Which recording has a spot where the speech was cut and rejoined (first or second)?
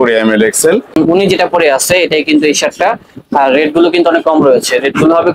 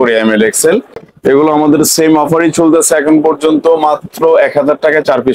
first